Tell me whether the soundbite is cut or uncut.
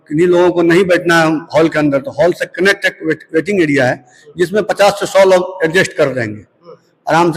uncut